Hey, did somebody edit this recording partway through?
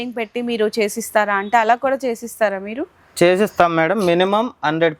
no; 0 cuts

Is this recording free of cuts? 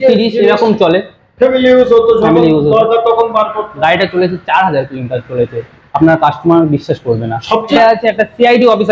no; 1 cut; at 7.8 s

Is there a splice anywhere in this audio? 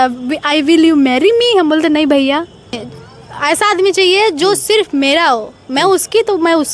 yes; 1 cut; at 2.9 s

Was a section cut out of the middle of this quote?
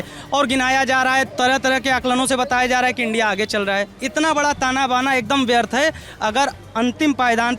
yes; 1 cut; at 4.0 s

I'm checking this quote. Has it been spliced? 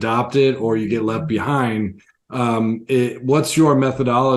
no; 0 cuts

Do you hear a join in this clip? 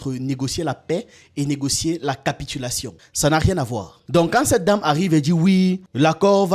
yes; 1 cut; at 4.0 s

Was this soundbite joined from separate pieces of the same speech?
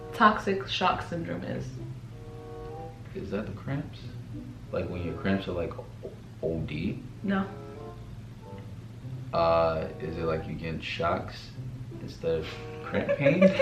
no; 0 cuts

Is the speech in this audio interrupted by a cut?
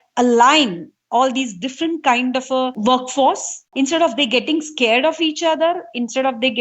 yes; 2 cuts; at 2.8 s, 3.7 s

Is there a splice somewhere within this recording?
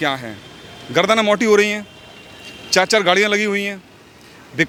no; 0 cuts

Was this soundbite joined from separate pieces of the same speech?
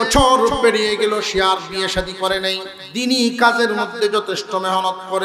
yes; 1 cut; at 2.7 s

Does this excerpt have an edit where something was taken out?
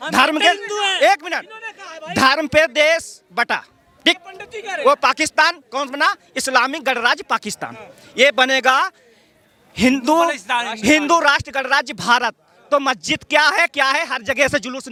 no; 0 cuts

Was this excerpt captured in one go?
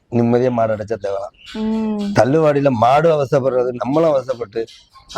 yes; 0 cuts

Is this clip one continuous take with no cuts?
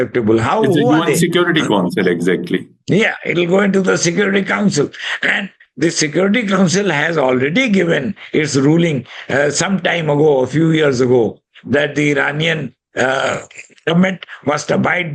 yes; 0 cuts

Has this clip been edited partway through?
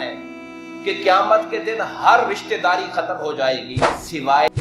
no; 0 cuts

